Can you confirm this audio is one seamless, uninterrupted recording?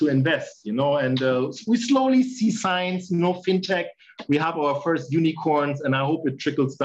yes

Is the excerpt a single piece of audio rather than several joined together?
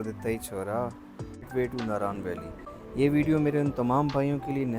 no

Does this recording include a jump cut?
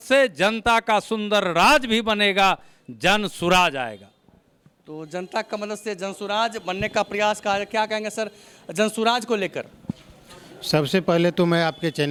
no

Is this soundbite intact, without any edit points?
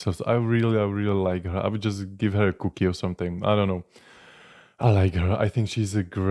yes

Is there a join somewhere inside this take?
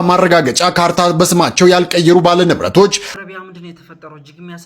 yes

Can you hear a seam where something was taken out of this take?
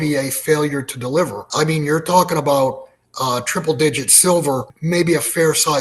yes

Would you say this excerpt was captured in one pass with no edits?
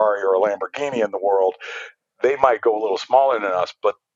yes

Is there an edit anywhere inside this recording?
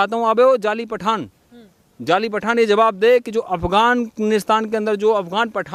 no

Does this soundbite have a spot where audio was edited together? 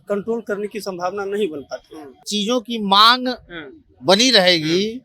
yes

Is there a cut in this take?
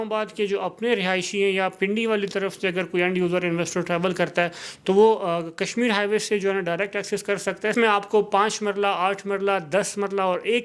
yes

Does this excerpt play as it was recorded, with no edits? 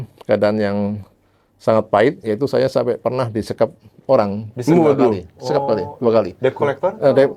yes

